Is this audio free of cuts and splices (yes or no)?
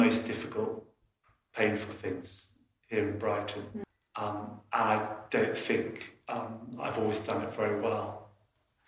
no